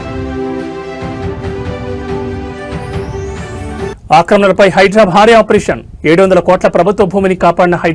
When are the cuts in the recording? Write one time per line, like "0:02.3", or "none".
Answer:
none

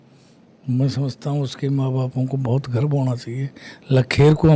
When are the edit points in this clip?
none

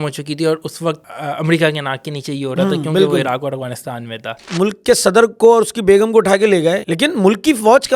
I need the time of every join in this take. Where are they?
0:01.0
0:04.4
0:06.8

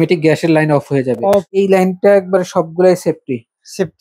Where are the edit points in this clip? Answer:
0:01.5

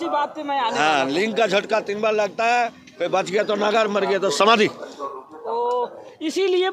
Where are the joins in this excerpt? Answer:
none

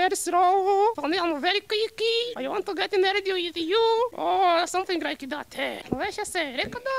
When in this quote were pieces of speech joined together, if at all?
0:01.0
0:02.3
0:04.2
0:05.8

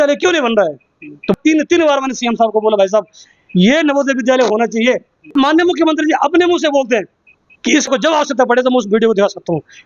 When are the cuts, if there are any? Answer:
0:01.3
0:05.3
0:07.9

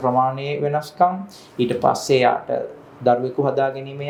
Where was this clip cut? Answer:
none

